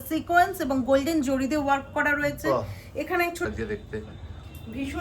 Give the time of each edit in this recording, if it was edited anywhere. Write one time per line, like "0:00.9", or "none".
0:03.5